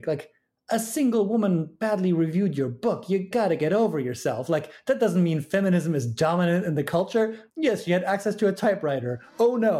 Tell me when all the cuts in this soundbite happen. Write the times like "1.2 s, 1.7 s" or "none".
3.3 s, 7.4 s